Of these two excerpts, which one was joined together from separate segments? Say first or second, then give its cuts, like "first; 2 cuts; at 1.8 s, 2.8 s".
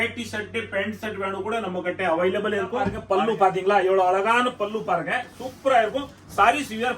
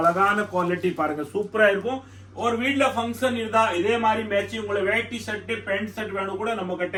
first; 1 cut; at 3.0 s